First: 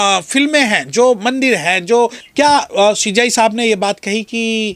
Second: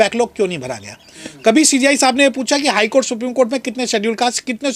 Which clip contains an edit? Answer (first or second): first